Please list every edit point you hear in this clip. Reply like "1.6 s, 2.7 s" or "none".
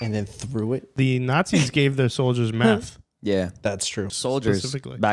0.9 s, 4.1 s